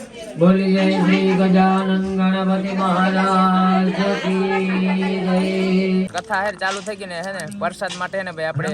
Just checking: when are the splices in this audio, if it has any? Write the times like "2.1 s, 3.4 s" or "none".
6.2 s